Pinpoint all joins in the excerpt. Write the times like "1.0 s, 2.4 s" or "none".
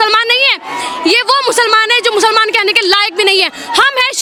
none